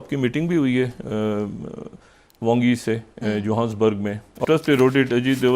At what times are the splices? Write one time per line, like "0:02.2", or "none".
0:04.4

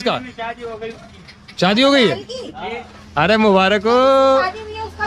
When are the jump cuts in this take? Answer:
none

